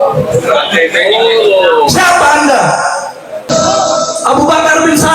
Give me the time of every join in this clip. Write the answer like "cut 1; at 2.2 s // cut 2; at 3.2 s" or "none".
cut 1; at 3.5 s